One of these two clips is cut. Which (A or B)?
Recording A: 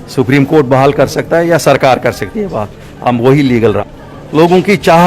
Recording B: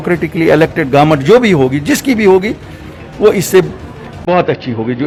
A